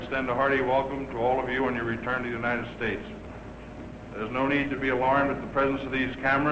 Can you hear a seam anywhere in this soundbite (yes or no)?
yes